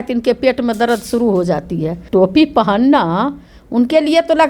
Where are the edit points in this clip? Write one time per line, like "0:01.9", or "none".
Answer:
0:02.0